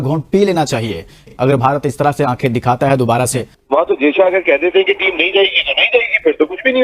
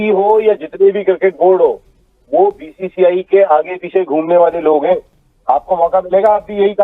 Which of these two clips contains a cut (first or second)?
first